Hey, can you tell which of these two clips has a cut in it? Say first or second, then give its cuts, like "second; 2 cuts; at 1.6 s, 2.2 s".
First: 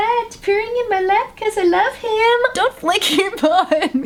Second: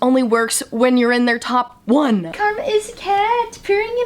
second; 1 cut; at 2.3 s